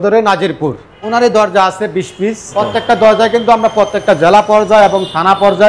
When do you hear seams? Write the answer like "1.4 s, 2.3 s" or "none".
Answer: 1.0 s, 2.5 s